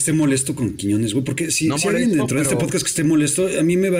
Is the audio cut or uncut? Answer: uncut